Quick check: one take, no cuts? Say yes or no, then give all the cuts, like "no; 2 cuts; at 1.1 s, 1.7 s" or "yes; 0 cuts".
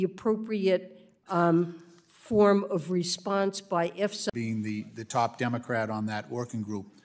yes; 0 cuts